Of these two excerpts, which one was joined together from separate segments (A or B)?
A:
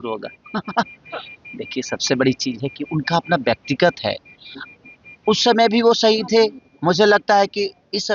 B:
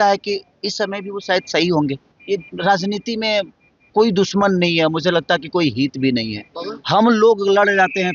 B